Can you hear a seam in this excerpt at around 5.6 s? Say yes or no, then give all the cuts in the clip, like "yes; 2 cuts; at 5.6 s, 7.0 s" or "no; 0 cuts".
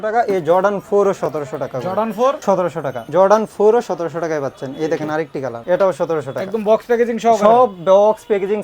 yes; 2 cuts; at 2.6 s, 5.6 s